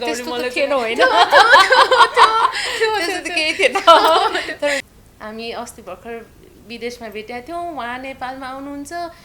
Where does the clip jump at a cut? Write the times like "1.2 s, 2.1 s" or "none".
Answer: 4.8 s